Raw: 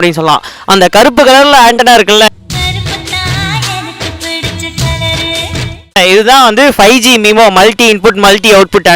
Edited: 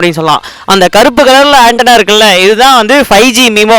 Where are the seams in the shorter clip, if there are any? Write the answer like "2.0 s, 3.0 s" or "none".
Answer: 2.3 s